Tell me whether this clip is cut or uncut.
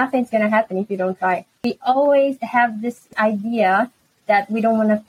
cut